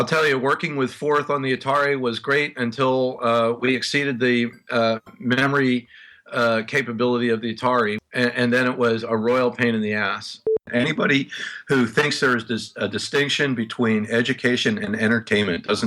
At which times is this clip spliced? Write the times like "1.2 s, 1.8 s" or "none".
8.0 s, 10.6 s